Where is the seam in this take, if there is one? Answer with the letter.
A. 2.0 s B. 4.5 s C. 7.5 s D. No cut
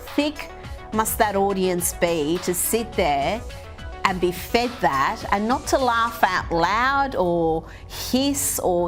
D